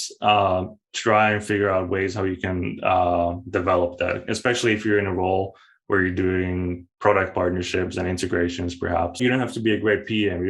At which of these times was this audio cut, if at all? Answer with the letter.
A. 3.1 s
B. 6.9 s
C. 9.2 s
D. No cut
C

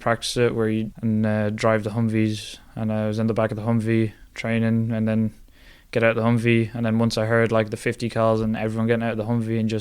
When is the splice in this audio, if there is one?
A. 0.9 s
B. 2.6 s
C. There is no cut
A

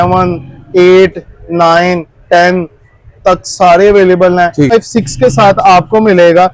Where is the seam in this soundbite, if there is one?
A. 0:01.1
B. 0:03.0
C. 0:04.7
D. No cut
C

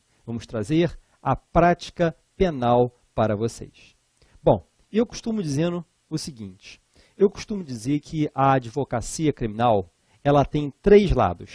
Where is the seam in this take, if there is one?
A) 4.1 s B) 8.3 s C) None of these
B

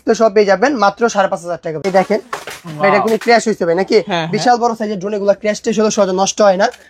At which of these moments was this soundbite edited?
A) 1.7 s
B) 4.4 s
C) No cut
A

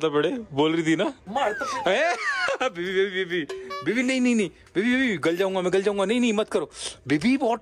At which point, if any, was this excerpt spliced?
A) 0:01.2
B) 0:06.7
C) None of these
A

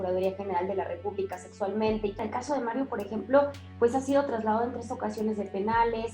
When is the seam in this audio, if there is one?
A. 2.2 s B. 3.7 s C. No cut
A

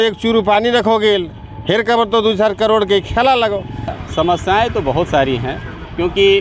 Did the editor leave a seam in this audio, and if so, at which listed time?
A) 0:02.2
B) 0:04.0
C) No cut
B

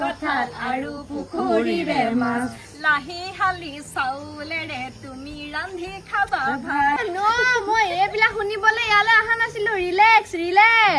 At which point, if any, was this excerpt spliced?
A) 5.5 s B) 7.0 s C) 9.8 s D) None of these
B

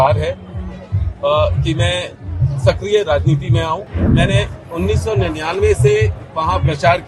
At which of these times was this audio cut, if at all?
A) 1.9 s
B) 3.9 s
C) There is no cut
B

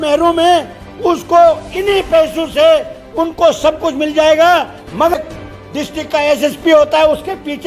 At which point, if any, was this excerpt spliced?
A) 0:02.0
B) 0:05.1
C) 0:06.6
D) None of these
B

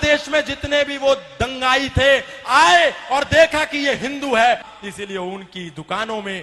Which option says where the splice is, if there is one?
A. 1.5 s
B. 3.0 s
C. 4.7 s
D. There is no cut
C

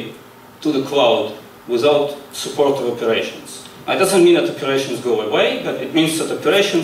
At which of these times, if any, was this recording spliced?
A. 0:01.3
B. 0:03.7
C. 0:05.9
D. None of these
D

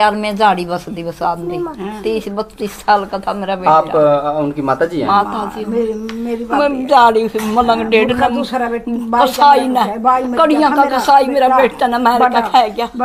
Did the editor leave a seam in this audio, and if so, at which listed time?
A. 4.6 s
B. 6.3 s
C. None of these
C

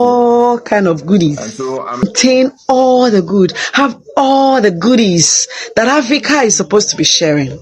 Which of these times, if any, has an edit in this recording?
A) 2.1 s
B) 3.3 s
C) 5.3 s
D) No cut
A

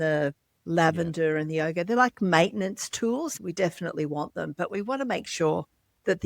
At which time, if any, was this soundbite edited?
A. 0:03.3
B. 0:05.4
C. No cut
A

